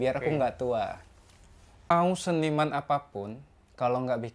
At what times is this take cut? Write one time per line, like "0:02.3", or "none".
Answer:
0:01.9